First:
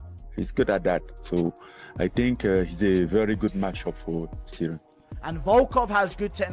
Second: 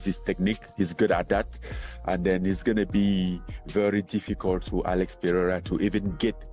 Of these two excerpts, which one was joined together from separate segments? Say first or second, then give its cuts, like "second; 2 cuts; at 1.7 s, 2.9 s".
first; 2 cuts; at 2.1 s, 5.0 s